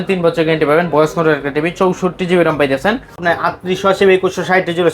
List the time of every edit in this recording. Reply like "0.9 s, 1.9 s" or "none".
3.2 s

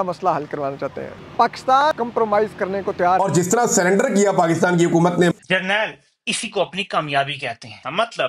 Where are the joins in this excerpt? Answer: 2.0 s, 3.2 s, 5.3 s

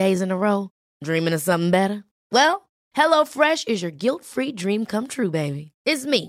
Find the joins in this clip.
none

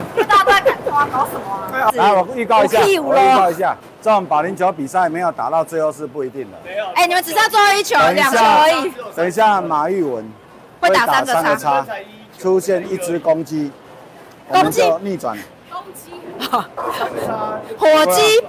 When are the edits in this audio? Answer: 2.0 s, 3.9 s

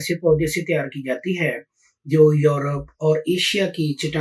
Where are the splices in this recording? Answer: none

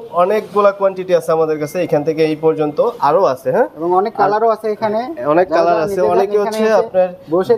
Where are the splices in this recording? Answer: none

